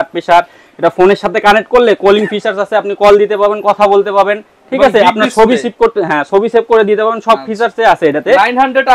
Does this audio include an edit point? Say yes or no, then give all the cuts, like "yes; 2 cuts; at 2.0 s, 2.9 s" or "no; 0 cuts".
no; 0 cuts